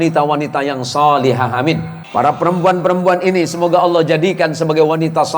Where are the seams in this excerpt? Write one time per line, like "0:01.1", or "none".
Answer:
0:02.0